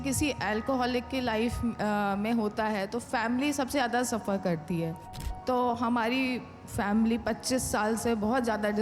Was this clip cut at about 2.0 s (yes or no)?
no